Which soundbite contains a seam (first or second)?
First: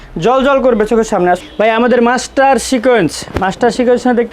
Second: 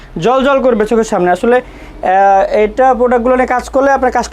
first